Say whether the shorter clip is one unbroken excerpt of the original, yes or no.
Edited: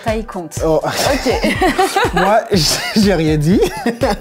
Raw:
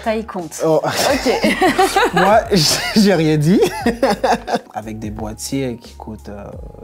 yes